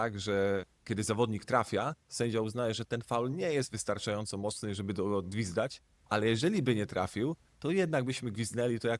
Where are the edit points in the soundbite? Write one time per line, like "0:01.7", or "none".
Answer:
none